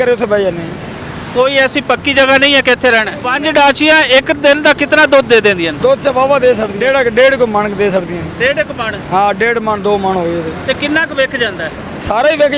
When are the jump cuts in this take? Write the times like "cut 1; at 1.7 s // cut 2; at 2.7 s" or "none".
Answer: cut 1; at 3.2 s // cut 2; at 5.7 s // cut 3; at 6.7 s